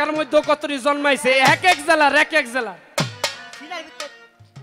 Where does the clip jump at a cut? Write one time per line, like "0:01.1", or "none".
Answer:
none